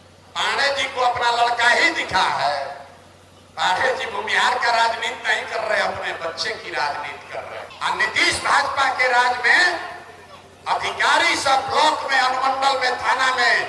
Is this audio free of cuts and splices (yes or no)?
no